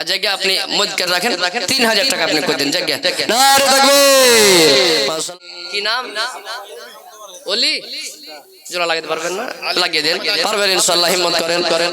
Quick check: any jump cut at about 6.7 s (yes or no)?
no